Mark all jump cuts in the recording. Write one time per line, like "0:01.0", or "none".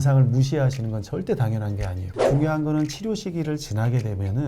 0:02.1